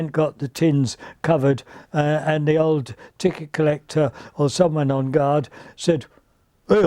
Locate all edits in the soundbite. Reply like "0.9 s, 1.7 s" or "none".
none